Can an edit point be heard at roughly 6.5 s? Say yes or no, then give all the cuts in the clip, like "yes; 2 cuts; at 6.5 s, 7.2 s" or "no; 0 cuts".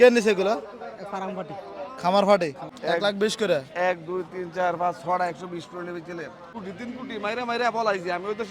yes; 2 cuts; at 2.7 s, 6.5 s